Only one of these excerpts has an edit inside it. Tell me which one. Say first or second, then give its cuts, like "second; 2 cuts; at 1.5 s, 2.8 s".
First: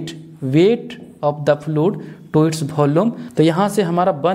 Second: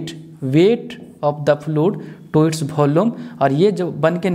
first; 1 cut; at 3.2 s